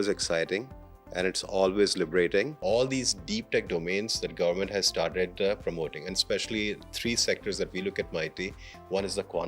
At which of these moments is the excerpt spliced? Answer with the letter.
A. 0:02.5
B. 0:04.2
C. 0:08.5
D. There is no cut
A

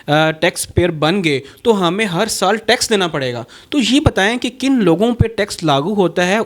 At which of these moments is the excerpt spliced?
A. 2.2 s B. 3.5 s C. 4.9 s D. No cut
D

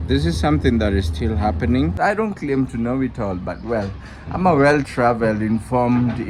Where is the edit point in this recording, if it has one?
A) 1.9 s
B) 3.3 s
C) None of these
A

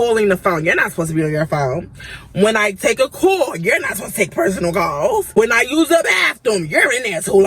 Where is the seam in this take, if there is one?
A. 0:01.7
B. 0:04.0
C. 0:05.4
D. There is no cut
C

